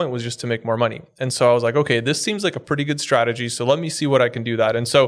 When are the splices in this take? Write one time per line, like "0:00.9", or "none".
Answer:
none

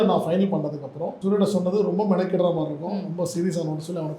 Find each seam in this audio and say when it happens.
0:01.1

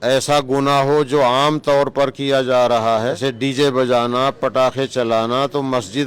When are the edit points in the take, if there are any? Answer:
0:03.2

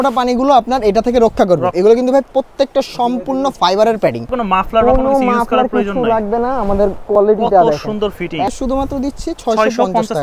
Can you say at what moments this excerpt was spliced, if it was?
0:01.7
0:04.3
0:08.5

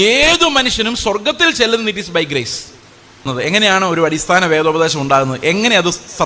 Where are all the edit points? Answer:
0:03.3

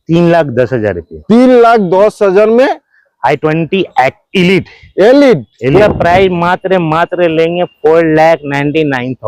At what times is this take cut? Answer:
0:05.7

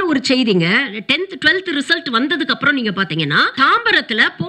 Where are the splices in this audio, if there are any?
0:03.5

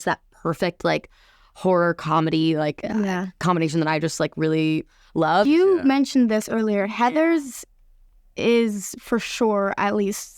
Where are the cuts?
0:05.4

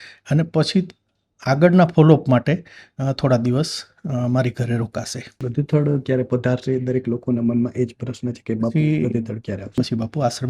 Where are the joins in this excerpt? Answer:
0:05.4
0:09.7

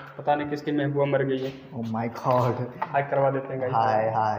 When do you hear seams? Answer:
none

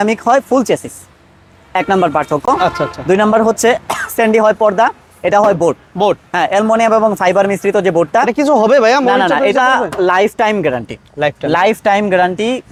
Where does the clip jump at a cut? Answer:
none

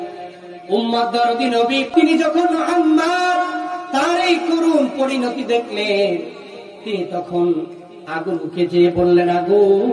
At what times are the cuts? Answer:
0:01.9

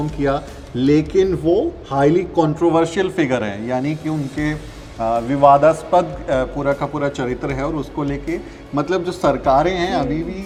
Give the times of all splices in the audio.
none

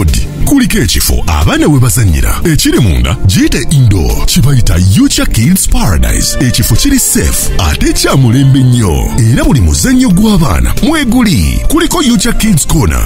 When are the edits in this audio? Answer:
none

